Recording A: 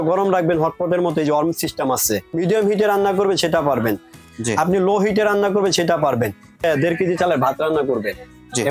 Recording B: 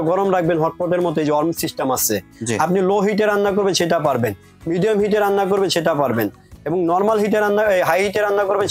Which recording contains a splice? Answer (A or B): A